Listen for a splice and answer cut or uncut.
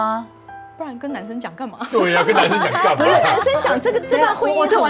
uncut